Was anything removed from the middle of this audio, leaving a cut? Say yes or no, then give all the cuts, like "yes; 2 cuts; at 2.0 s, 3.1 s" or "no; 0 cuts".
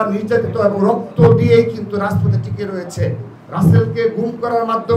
no; 0 cuts